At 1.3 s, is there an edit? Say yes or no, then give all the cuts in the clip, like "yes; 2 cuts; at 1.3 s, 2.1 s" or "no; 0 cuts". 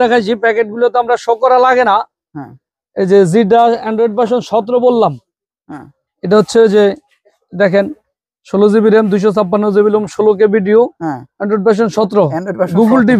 no; 0 cuts